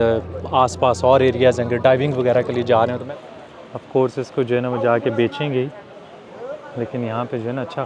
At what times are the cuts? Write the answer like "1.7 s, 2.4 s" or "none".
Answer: 3.0 s

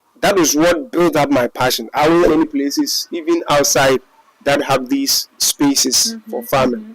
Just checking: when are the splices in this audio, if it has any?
2.3 s

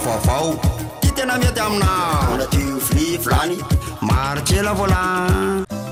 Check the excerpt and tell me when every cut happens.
none

